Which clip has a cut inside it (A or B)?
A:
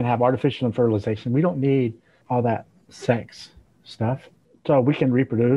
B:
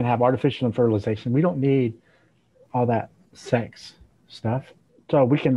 A